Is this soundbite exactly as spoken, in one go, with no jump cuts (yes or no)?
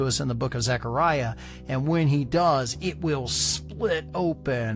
yes